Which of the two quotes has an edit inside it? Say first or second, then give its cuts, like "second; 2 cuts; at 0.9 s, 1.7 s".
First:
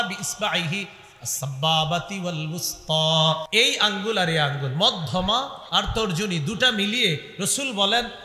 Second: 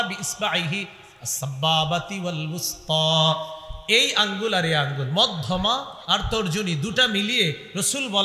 first; 1 cut; at 3.5 s